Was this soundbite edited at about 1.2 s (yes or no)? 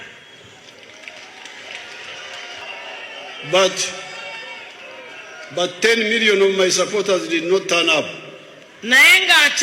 no